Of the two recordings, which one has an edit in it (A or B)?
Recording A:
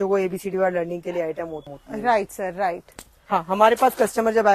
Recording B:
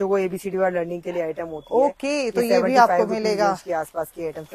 A